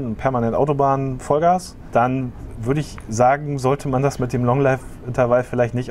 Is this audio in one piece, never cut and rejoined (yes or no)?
no